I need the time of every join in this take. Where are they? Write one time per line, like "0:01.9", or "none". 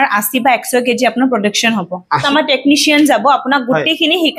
0:02.2